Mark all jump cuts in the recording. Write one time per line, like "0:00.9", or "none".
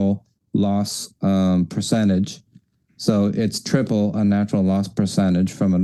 none